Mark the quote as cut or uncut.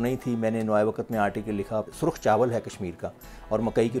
cut